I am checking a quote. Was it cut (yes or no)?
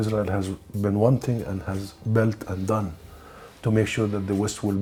no